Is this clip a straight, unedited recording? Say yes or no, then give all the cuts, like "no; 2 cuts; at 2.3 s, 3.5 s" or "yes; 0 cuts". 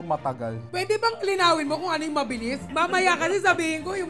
no; 1 cut; at 2.7 s